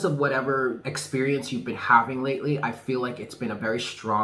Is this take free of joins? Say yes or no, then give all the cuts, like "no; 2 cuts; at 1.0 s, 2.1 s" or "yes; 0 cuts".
no; 1 cut; at 0.9 s